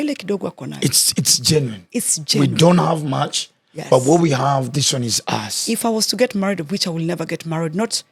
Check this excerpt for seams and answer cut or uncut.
uncut